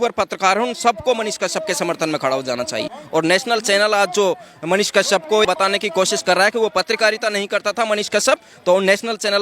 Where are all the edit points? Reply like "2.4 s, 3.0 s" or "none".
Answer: 3.0 s, 5.4 s